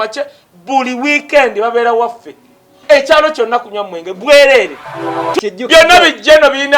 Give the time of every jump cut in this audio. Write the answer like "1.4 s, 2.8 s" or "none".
5.3 s